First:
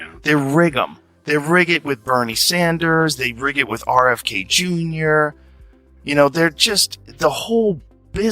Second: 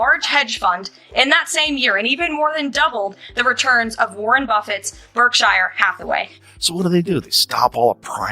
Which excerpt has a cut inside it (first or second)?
second